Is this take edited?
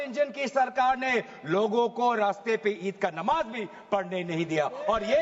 no; 0 cuts

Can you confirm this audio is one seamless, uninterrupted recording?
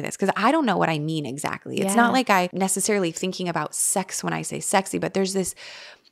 no; 1 cut; at 2.5 s

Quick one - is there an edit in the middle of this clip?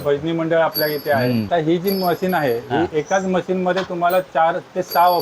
yes; 1 cut; at 1.5 s

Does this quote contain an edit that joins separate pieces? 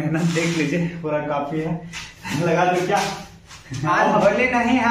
no; 0 cuts

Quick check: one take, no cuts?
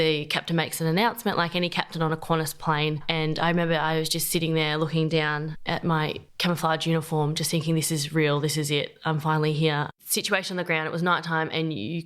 no; 1 cut; at 10.0 s

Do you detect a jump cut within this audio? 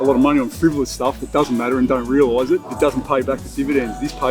no; 0 cuts

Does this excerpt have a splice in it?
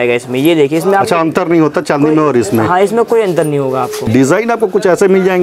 yes; 1 cut; at 4.1 s

